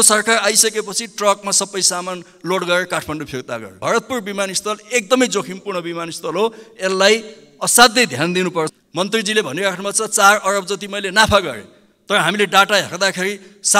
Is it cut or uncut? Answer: cut